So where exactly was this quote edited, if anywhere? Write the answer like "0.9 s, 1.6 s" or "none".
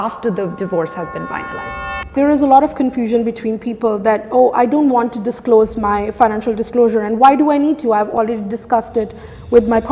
2.1 s